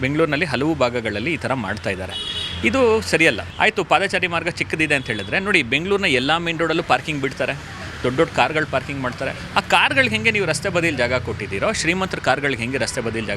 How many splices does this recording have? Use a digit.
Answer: 1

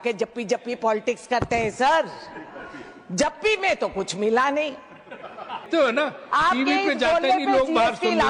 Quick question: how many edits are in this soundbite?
1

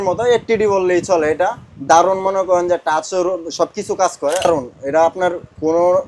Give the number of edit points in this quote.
1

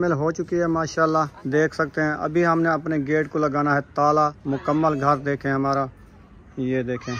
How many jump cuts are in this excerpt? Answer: 2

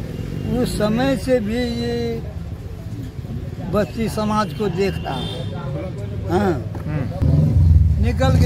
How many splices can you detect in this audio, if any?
1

